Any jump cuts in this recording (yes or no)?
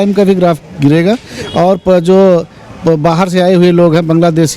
no